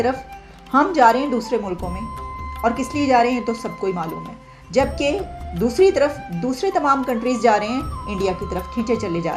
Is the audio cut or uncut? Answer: uncut